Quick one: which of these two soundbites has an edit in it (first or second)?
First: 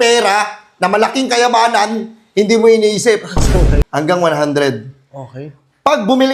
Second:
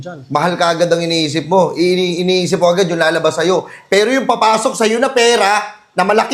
first